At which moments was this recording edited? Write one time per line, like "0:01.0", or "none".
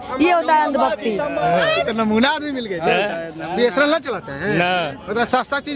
0:01.4